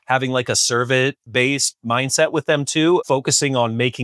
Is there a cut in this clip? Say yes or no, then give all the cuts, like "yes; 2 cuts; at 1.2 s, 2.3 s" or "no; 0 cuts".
yes; 2 cuts; at 1.2 s, 3.0 s